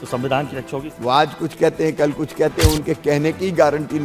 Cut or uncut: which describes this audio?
cut